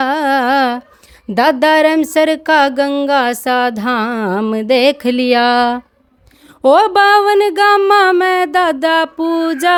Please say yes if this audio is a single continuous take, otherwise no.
yes